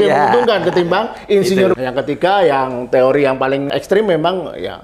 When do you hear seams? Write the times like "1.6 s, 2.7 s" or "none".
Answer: 1.8 s, 3.7 s